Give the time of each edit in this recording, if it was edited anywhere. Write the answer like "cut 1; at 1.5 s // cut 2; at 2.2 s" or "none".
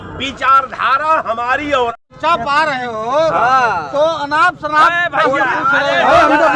cut 1; at 1.9 s